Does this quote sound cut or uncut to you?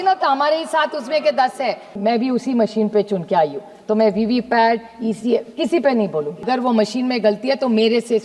cut